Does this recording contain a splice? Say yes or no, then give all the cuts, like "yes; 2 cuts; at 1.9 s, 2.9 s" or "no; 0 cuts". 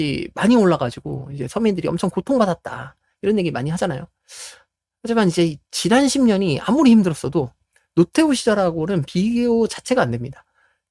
no; 0 cuts